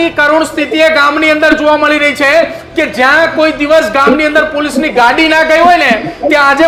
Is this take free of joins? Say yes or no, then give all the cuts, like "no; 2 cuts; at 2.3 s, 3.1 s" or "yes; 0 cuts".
yes; 0 cuts